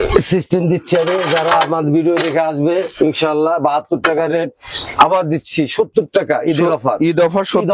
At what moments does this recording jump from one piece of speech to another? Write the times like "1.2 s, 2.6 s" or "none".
none